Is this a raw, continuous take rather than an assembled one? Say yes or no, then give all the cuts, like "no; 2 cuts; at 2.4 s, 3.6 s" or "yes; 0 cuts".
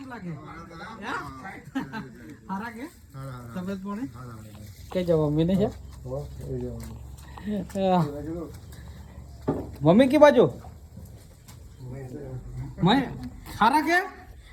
yes; 0 cuts